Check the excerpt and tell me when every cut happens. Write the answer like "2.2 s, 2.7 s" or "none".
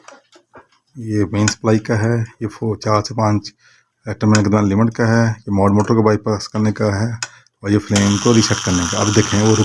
none